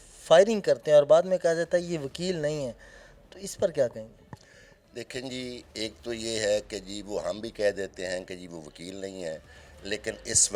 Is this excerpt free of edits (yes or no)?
yes